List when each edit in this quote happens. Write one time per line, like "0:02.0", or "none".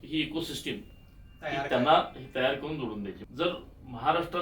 0:03.2